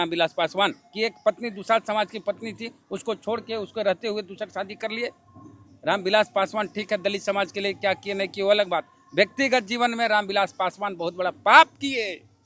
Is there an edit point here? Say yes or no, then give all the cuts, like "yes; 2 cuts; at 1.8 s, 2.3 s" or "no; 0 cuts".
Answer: no; 0 cuts